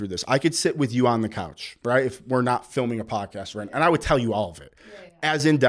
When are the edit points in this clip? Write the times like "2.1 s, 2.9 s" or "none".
none